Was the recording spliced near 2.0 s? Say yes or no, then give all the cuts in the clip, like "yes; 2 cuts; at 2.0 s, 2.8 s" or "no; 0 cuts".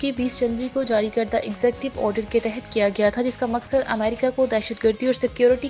no; 0 cuts